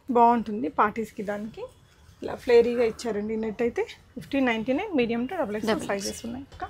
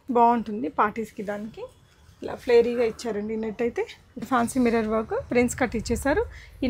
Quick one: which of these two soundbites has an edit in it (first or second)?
second